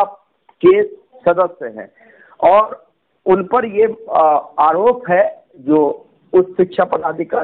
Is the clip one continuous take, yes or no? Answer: yes